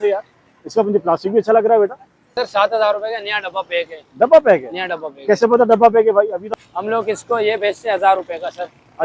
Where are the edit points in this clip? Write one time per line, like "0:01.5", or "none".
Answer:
0:02.3
0:06.5